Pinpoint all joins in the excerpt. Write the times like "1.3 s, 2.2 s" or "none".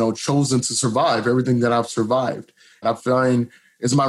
2.8 s